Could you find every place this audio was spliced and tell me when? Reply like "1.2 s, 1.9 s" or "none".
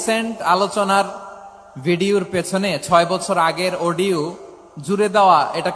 none